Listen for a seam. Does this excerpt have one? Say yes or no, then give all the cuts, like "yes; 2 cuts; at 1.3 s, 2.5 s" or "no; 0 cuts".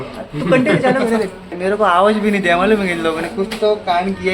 yes; 1 cut; at 1.4 s